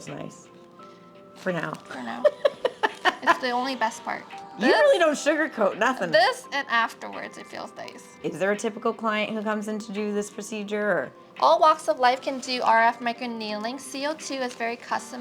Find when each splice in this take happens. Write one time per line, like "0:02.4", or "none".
none